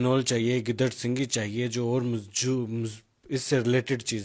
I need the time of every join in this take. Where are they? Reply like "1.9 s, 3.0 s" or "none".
none